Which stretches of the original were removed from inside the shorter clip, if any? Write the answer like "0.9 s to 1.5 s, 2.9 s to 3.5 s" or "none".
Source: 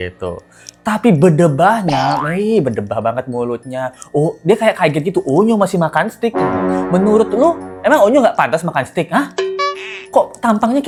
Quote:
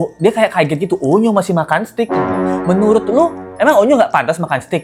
none